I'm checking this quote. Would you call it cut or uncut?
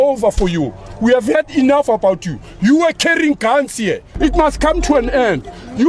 cut